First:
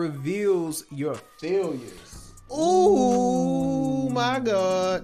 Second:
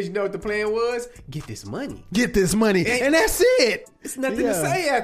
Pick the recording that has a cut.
second; 1 cut; at 3.9 s

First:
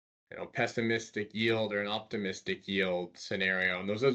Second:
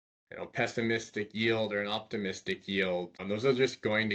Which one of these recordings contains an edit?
second; 1 cut; at 3.2 s

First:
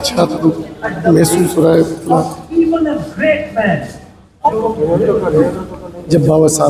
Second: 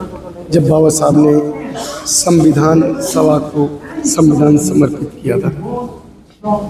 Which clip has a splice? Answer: first; 1 cut; at 4.5 s

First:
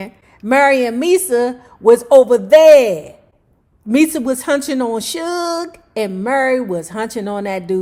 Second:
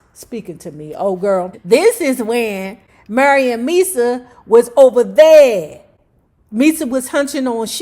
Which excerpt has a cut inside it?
second; 1 cut; at 1.6 s

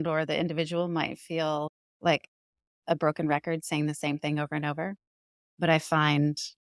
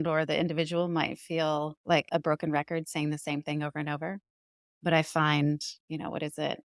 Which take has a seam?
second; 2 cuts; at 1.8 s, 5.7 s

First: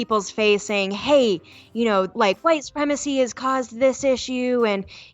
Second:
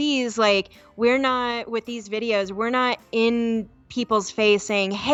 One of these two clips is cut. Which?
first; 1 cut; at 2.1 s

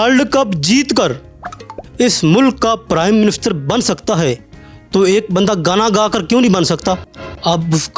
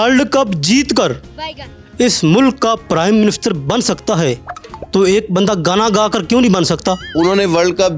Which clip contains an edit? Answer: first; 1 cut; at 7.0 s

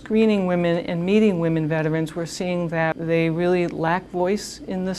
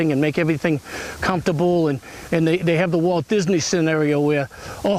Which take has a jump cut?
first; 1 cut; at 2.9 s

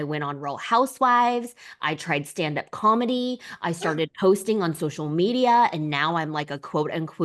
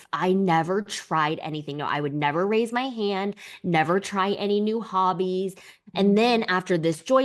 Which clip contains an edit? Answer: second; 1 cut; at 5.7 s

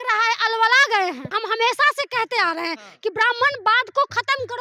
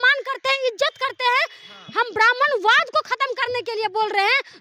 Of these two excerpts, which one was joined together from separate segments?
first; 1 cut; at 1.3 s

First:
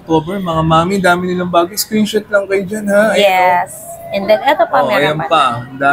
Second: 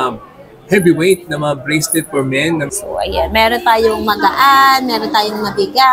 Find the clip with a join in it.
second; 1 cut; at 2.7 s

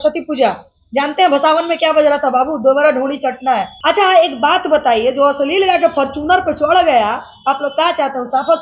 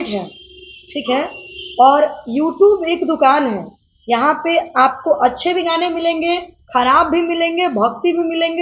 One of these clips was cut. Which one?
first; 1 cut; at 3.7 s

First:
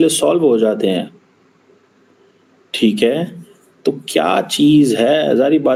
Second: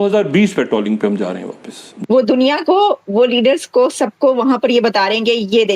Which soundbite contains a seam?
second; 1 cut; at 1.4 s

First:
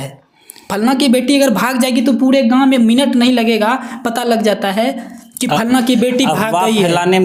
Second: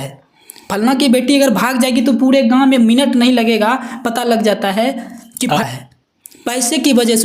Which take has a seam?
second; 1 cut; at 5.6 s

